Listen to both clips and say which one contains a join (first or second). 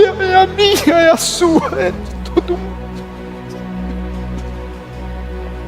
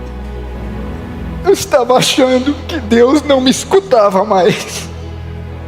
second